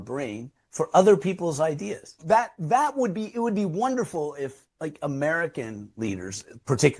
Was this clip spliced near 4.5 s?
no; 1 cut; at 2.1 s

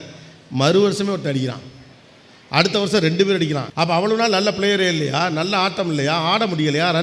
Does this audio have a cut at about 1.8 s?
no; 1 cut; at 3.6 s

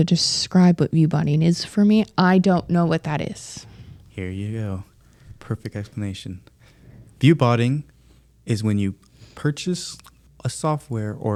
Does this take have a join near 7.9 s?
no; 0 cuts

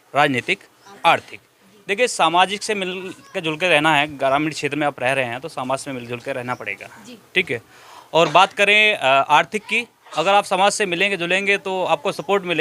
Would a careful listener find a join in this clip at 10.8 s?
no; 0 cuts

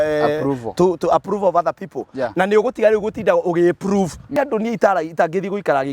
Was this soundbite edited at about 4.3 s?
yes; 1 cut; at 4.3 s

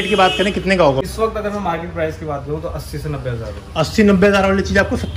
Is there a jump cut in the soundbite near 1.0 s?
yes; 1 cut; at 1.0 s

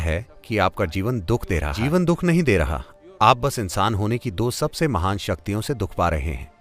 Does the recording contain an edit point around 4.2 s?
no; 0 cuts

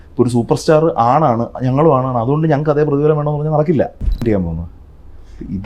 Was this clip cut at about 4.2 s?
yes; 1 cut; at 4.2 s

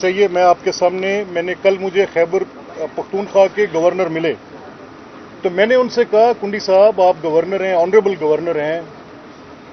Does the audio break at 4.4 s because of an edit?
no; 0 cuts

